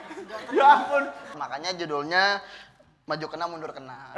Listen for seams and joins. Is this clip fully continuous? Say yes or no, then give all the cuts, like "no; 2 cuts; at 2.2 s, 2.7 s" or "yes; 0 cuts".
no; 1 cut; at 1.3 s